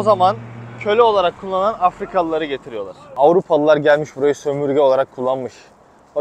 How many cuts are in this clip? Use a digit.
1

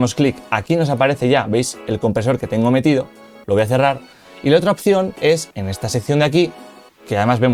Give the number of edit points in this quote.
0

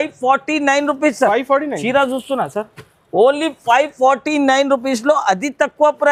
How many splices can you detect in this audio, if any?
0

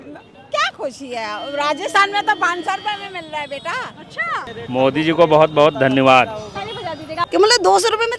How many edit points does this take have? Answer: 2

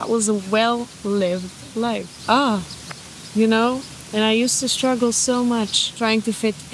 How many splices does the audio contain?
2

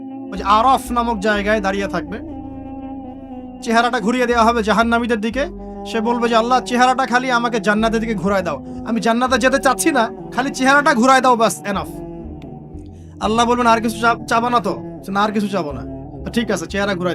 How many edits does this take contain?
2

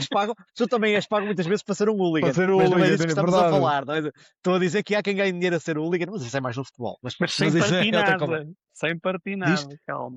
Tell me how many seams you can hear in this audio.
0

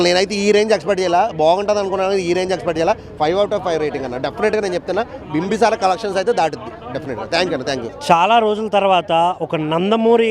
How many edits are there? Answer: 0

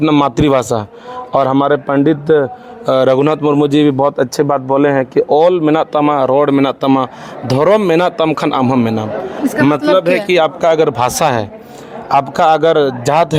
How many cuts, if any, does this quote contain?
0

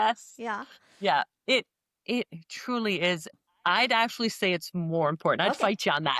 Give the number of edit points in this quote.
1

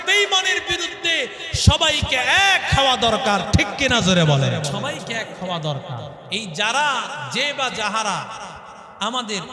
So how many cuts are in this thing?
2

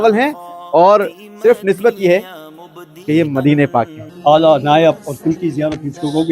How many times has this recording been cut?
1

